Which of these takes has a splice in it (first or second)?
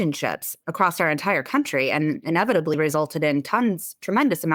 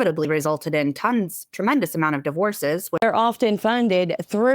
second